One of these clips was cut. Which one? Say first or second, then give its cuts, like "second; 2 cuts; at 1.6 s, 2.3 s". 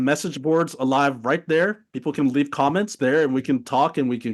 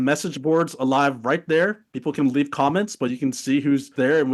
first; 1 cut; at 2.9 s